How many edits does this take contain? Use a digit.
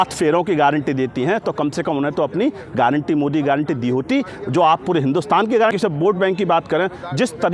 1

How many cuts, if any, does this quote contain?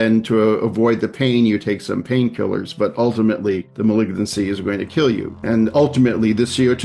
2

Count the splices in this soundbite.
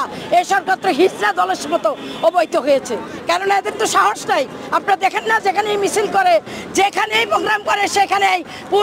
0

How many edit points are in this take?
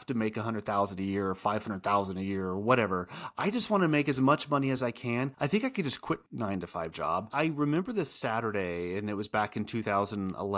2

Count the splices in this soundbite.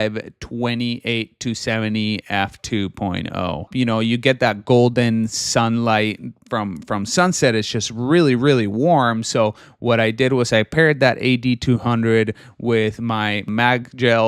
1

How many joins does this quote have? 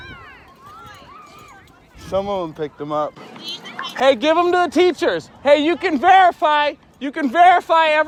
0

